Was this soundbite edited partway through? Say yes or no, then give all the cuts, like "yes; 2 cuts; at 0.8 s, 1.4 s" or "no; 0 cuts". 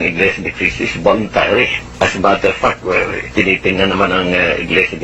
yes; 1 cut; at 1.8 s